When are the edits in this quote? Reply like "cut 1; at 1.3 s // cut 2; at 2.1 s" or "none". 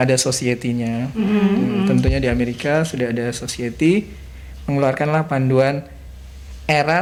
none

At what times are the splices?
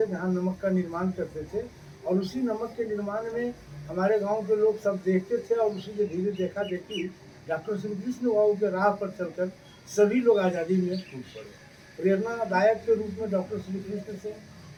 none

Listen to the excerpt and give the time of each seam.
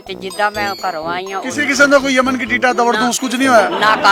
none

